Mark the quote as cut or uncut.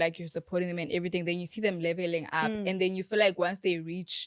uncut